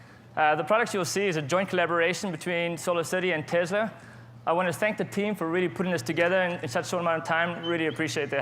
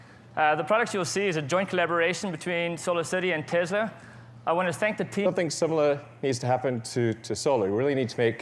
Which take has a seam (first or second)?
first